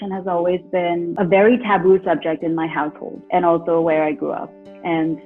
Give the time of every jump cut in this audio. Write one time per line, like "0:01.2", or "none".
none